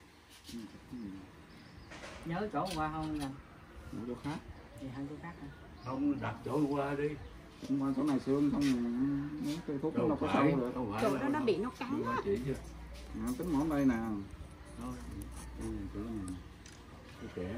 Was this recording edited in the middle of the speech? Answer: no; 0 cuts

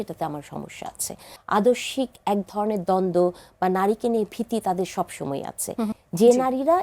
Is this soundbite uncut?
no; 2 cuts; at 1.3 s, 5.9 s

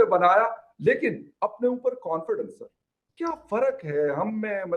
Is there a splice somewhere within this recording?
no; 0 cuts

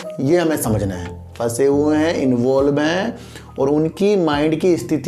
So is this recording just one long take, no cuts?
no; 1 cut; at 1.3 s

